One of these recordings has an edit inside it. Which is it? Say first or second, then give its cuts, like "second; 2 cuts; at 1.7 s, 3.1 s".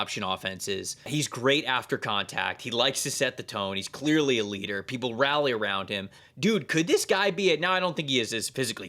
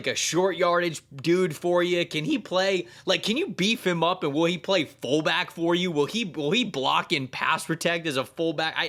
first; 2 cuts; at 1.1 s, 6.2 s